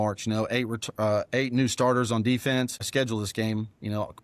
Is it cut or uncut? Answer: cut